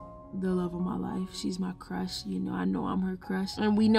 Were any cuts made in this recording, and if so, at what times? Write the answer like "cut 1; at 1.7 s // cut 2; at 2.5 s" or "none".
none